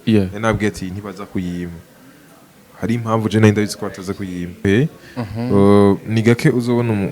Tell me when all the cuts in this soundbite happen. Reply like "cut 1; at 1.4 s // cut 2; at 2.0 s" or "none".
cut 1; at 4.6 s